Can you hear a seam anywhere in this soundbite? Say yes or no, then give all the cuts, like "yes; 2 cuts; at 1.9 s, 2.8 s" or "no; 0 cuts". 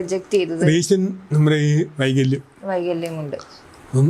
no; 0 cuts